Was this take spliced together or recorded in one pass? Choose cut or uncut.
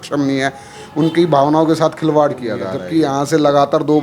cut